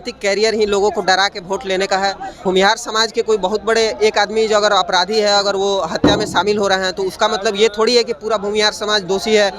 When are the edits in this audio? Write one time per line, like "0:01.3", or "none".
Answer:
0:02.3